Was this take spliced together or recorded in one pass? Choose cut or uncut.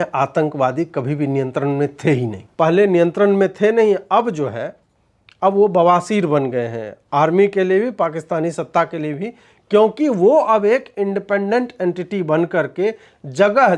cut